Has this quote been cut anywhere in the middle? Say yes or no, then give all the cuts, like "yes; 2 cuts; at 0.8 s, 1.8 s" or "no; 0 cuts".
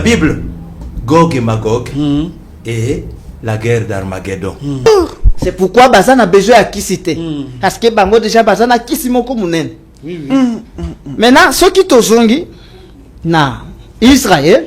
yes; 1 cut; at 4.9 s